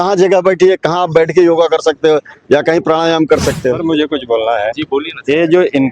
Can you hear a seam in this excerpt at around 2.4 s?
no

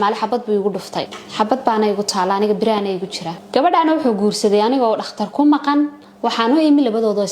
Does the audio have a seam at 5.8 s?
no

